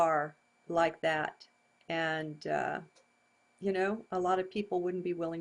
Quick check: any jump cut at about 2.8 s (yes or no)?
yes